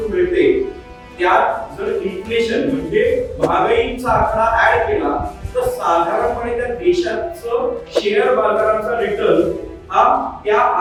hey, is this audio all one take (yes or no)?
yes